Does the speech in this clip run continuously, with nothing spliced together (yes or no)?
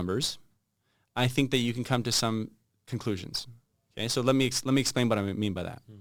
yes